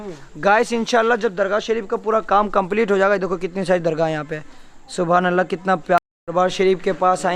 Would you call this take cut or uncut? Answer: cut